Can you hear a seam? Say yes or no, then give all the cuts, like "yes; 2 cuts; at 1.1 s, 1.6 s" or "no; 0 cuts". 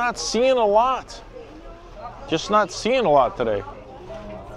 no; 0 cuts